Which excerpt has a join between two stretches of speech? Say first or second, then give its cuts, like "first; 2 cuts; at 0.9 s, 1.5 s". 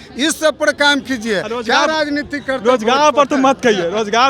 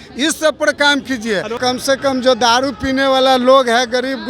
second; 1 cut; at 1.6 s